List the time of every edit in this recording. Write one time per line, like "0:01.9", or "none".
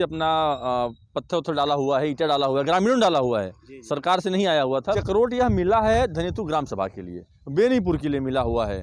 0:05.0

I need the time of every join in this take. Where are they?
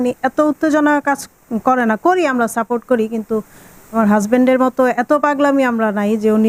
none

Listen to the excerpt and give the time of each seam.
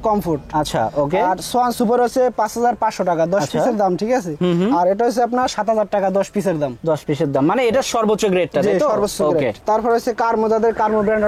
none

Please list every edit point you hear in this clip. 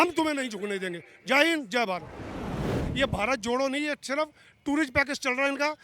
0:02.7

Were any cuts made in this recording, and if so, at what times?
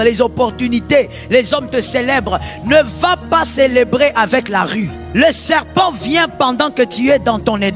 0:05.0

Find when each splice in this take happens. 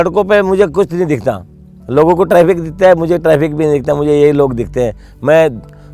none

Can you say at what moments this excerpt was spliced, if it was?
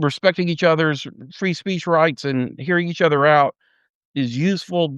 0:04.0

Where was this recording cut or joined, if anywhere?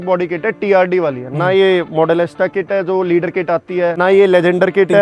0:04.0

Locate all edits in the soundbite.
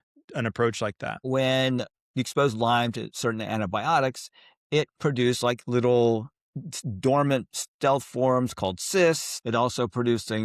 0:01.2
0:09.3

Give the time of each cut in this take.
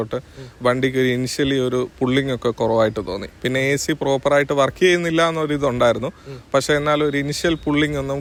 none

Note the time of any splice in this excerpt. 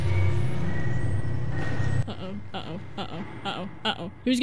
none

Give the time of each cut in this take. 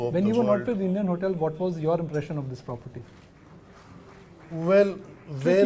0:01.1

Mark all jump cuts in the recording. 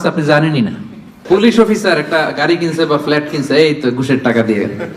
0:01.2

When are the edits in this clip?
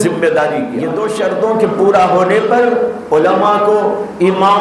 0:01.0

